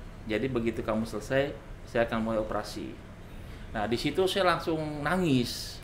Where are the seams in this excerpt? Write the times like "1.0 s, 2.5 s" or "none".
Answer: none